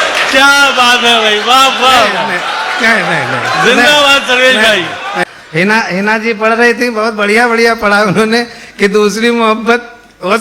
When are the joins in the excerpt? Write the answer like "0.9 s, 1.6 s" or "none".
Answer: 5.3 s

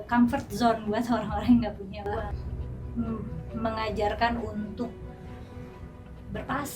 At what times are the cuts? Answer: 2.3 s

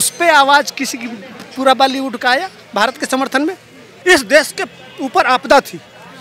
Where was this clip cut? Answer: 3.9 s

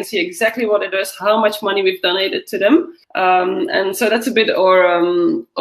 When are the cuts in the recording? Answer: 3.0 s

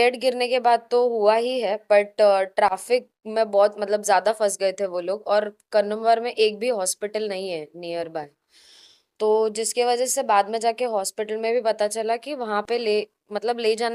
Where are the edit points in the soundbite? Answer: none

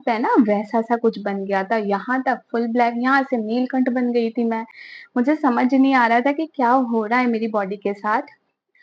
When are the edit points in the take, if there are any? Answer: none

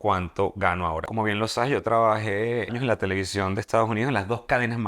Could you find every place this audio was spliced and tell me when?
1.1 s, 2.7 s

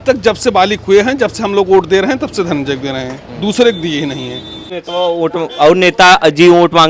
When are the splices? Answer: 4.7 s

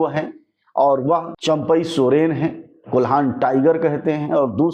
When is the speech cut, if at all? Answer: 1.3 s

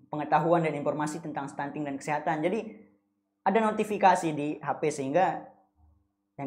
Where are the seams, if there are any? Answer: none

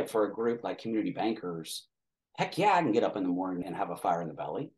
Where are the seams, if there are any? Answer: 3.6 s

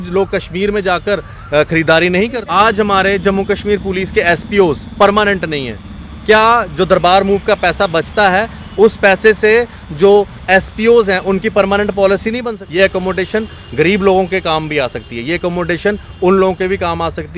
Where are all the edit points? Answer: 2.4 s, 12.5 s

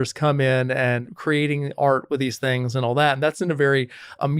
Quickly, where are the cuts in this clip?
1.0 s

